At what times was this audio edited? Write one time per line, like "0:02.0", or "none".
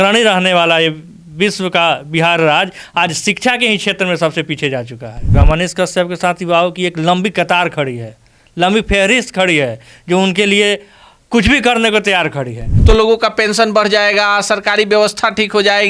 0:05.4
0:12.7